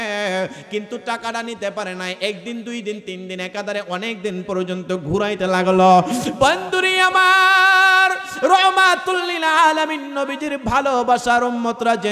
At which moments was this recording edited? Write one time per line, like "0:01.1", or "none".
none